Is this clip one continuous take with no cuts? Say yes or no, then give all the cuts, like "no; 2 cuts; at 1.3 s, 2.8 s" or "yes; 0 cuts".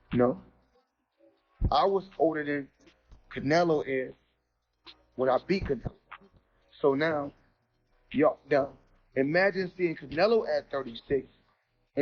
yes; 0 cuts